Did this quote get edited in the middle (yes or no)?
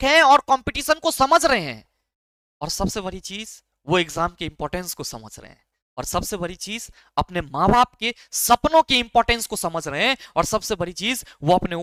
no